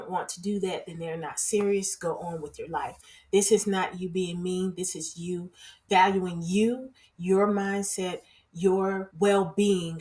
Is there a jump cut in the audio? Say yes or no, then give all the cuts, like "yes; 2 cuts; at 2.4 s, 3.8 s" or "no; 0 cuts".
yes; 1 cut; at 9.1 s